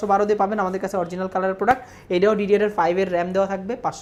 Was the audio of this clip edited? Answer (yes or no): no